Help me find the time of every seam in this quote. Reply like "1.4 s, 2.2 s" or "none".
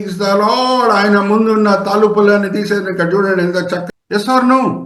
3.9 s